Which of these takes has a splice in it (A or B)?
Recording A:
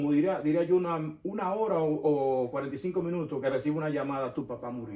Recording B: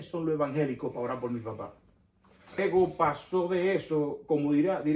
B